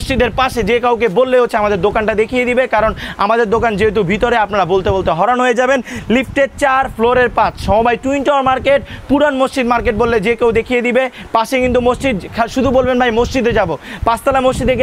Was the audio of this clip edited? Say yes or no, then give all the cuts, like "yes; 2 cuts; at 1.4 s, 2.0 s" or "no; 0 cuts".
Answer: no; 0 cuts